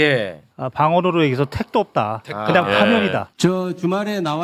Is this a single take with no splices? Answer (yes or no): no